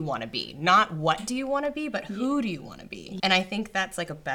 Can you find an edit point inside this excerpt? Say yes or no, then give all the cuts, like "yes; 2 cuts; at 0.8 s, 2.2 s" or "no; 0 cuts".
yes; 1 cut; at 3.1 s